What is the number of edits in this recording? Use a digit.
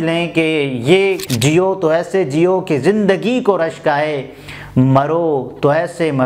1